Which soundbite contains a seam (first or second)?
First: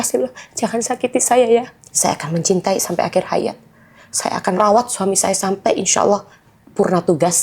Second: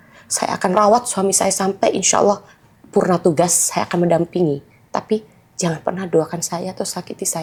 first